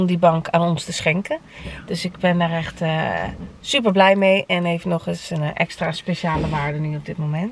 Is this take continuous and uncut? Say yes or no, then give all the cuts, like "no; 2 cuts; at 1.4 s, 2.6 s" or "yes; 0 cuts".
yes; 0 cuts